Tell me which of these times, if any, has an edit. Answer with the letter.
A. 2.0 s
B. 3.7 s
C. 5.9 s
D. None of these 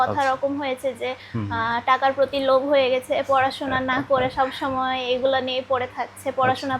D